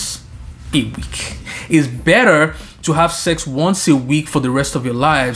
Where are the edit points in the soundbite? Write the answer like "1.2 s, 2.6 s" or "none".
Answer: 1.5 s